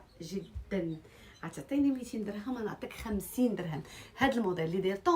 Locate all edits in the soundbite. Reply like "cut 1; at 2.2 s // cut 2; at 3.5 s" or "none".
none